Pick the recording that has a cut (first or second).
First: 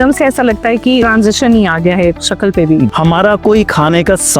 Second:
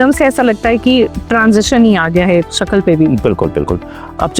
first